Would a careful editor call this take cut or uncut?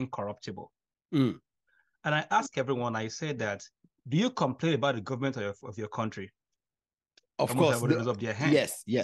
uncut